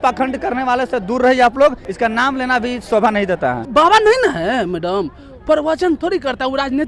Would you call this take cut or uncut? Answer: cut